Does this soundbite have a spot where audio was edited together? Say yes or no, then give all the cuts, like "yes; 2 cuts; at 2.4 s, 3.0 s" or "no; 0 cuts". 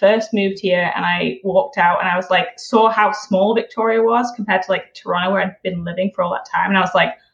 no; 0 cuts